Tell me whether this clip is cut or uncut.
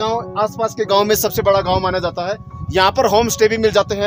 uncut